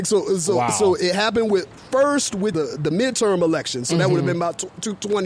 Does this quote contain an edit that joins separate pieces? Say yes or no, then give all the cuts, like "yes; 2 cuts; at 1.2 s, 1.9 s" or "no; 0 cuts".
yes; 2 cuts; at 1.7 s, 2.5 s